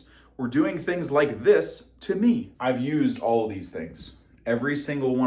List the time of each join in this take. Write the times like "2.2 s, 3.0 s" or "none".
2.5 s

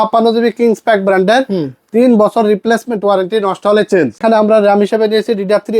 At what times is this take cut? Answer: 4.2 s

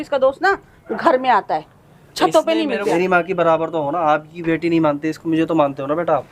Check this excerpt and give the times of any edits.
2.8 s

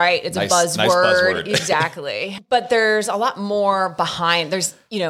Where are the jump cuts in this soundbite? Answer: 2.3 s

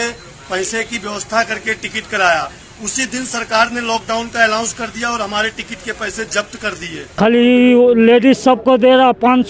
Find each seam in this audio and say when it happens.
7.0 s

